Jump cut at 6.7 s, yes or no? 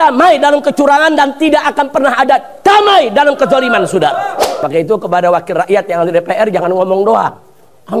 no